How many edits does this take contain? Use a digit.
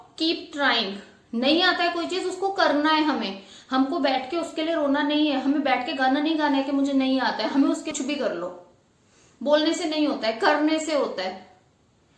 1